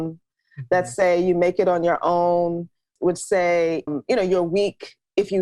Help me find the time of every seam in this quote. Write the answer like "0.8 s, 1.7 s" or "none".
2.9 s, 3.9 s